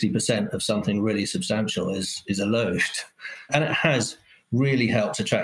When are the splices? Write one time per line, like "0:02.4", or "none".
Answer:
0:03.5